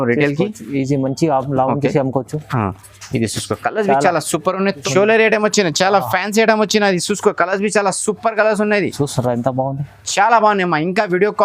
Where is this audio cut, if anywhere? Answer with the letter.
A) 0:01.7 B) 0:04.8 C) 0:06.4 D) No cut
B